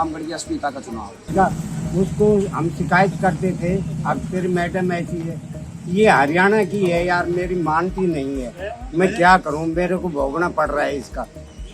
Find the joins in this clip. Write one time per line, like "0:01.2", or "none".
0:01.3